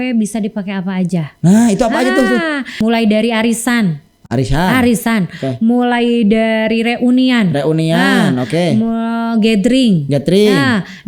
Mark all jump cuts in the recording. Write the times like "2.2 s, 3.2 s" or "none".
2.7 s